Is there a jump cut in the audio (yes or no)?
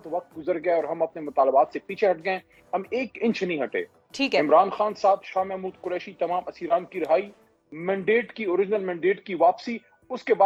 no